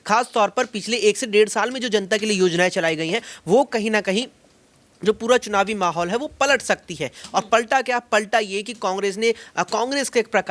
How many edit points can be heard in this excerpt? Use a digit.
0